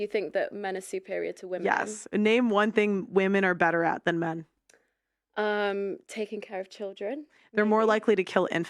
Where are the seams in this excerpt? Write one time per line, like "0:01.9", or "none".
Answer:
0:02.0

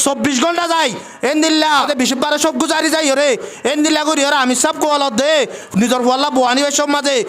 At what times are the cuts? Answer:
0:01.9

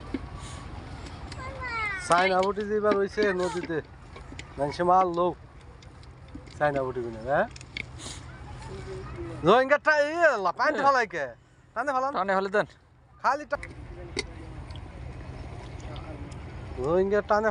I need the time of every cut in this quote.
0:13.6

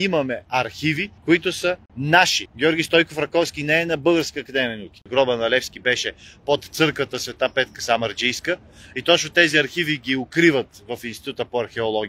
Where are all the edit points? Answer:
0:05.0

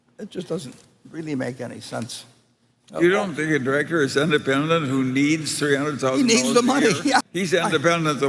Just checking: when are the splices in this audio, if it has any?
0:07.3

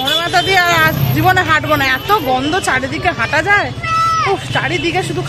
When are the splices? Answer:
none

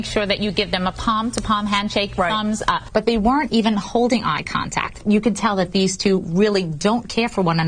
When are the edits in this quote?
0:02.8

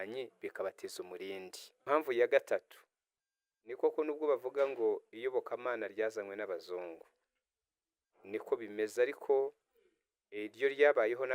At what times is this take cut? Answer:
0:01.7

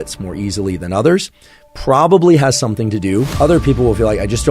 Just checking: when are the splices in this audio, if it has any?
0:03.3

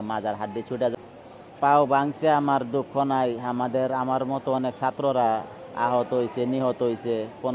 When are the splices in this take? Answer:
0:00.9

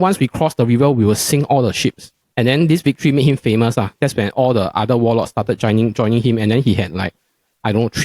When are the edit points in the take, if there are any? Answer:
0:02.1

